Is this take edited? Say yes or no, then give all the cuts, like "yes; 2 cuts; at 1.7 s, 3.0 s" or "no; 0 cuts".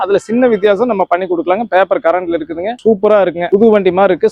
yes; 1 cut; at 2.8 s